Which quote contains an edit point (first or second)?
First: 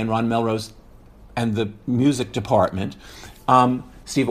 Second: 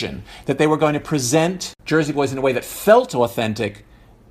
second